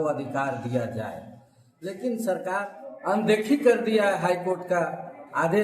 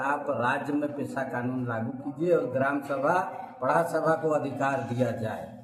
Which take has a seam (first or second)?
first